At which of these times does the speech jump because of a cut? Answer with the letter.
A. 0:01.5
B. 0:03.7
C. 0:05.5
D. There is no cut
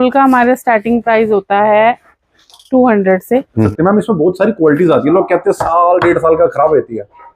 B